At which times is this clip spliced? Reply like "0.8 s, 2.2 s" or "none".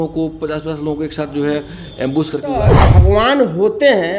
2.7 s